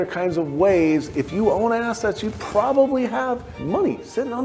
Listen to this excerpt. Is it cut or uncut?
cut